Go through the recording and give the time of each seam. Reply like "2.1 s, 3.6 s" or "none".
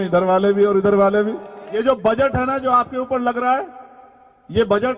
1.6 s

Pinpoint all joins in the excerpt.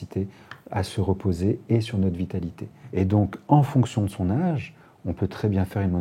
2.8 s

